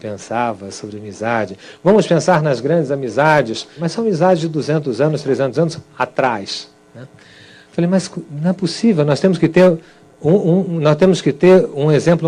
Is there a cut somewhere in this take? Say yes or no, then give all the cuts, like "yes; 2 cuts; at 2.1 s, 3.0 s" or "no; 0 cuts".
yes; 1 cut; at 7.0 s